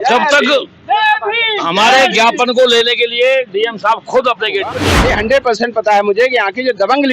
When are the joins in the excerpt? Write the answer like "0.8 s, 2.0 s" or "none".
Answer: 4.9 s